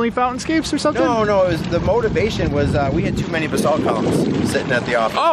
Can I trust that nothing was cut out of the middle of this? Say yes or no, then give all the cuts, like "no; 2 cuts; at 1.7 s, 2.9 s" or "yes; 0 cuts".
yes; 0 cuts